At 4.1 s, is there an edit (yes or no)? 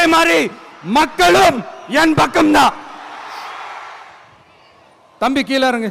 yes